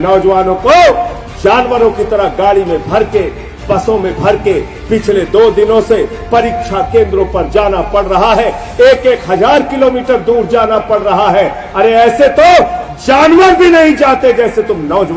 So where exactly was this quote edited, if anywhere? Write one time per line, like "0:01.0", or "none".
none